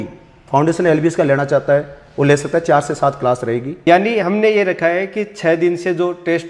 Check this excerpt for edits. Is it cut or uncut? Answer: cut